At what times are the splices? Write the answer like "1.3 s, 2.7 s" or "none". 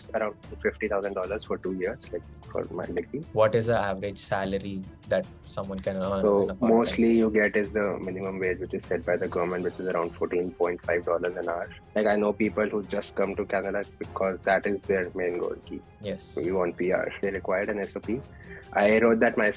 3.2 s, 11.8 s, 17.2 s